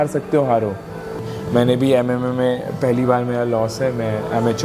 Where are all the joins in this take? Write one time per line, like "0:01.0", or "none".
0:01.2

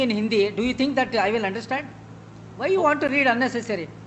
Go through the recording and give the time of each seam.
none

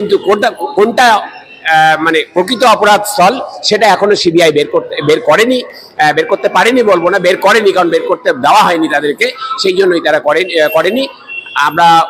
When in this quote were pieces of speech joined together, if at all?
none

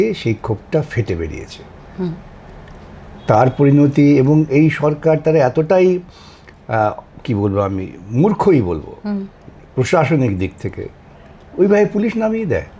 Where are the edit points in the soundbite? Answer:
none

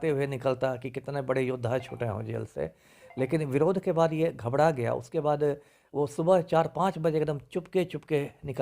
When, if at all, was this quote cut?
none

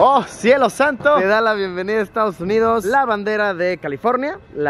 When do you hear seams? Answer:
0:01.2

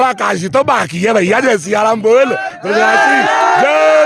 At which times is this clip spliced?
none

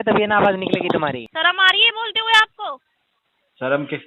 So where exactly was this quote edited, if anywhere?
0:01.3

